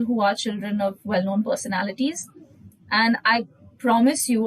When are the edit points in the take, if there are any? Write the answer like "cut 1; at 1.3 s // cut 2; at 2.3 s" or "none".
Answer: none

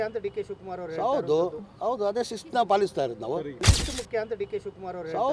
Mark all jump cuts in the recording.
cut 1; at 3.8 s

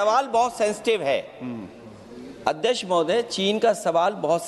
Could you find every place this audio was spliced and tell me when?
none

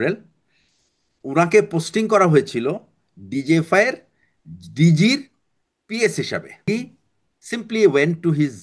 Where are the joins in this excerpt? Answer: cut 1; at 6.7 s

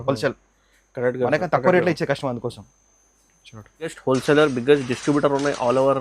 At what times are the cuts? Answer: cut 1; at 3.9 s

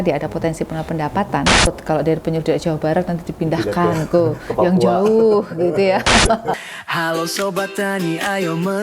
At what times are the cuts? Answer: cut 1; at 1.7 s // cut 2; at 6.5 s

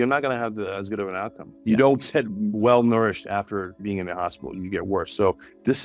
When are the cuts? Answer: cut 1; at 1.5 s // cut 2; at 2.3 s

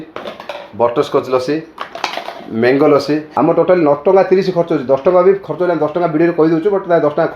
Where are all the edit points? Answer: cut 1; at 3.3 s

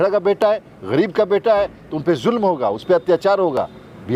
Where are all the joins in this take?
none

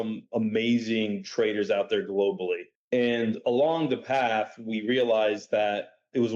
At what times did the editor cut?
cut 1; at 2.7 s

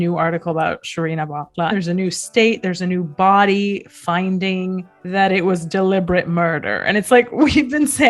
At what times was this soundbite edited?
cut 1; at 1.7 s

